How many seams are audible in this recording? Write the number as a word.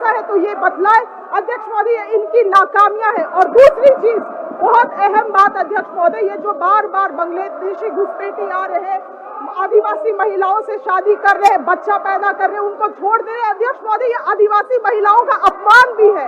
zero